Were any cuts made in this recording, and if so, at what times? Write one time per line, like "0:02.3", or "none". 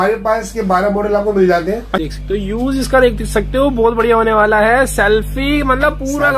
0:02.2